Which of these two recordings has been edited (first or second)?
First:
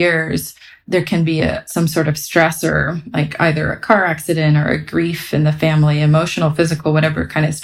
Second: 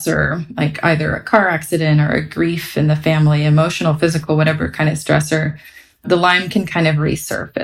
first